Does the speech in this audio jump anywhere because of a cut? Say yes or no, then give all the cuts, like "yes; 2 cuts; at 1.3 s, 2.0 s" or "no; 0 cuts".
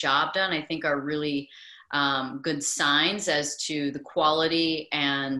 no; 0 cuts